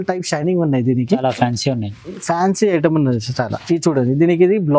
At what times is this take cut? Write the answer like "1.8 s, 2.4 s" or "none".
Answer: 1.2 s

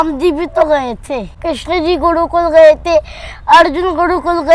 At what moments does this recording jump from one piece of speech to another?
1.4 s

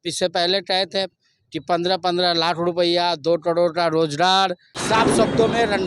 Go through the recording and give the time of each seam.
4.7 s

